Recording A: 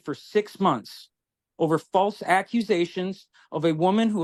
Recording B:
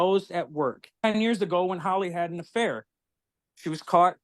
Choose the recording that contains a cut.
B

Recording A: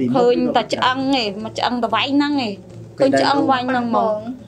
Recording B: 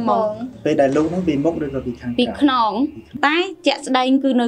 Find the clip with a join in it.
B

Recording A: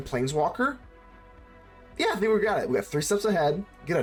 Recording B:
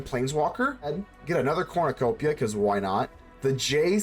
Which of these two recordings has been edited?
B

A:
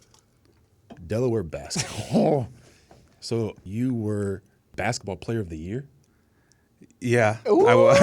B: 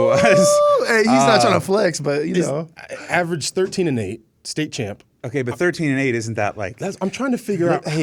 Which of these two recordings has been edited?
A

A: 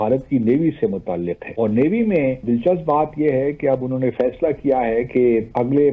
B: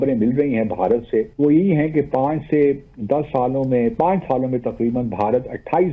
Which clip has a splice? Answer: A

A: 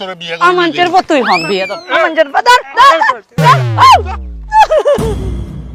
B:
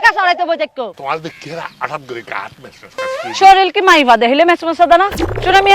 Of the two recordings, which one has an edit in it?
B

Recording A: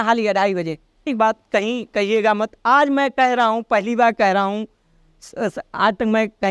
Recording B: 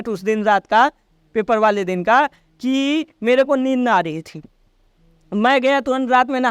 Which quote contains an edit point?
A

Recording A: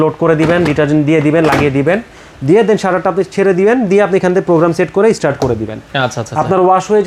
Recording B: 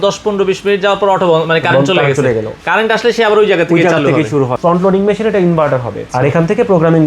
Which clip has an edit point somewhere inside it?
B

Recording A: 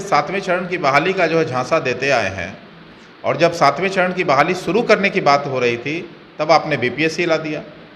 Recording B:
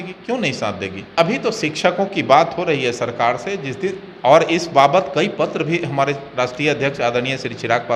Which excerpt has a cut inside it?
B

